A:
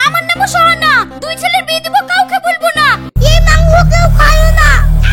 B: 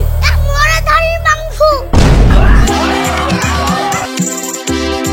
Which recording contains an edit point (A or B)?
A